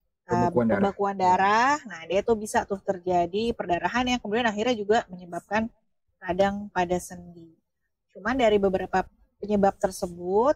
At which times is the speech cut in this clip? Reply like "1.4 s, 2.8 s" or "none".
none